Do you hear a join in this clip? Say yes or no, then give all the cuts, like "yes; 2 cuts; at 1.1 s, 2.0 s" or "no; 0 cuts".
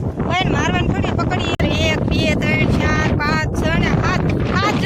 yes; 1 cut; at 1.6 s